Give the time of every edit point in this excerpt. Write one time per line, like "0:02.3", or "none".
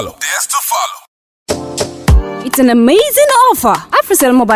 0:00.9